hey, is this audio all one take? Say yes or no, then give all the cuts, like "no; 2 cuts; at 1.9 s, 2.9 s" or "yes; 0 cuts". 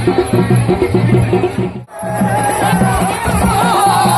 no; 1 cut; at 1.9 s